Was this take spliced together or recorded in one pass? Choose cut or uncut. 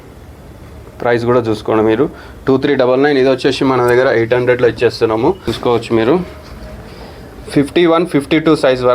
cut